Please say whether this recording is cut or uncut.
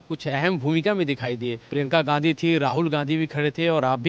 cut